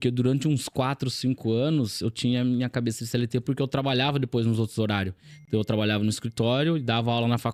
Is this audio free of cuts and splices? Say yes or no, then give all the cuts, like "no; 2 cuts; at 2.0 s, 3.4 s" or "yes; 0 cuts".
yes; 0 cuts